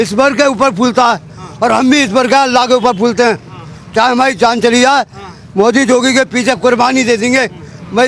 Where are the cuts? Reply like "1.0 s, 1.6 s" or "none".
none